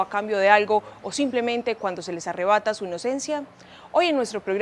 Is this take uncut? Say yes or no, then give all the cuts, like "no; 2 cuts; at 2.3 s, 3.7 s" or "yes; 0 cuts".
yes; 0 cuts